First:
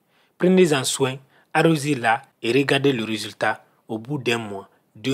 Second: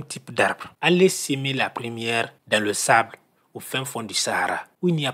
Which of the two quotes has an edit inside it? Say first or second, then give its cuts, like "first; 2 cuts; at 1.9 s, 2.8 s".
first; 1 cut; at 2.3 s